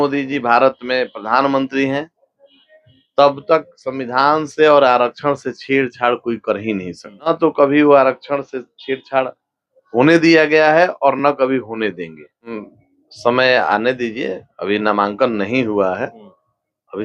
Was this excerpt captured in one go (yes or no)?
no